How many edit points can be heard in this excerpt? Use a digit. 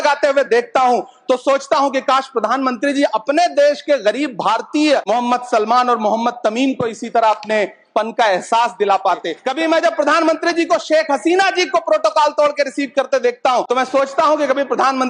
3